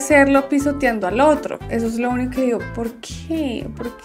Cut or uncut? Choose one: uncut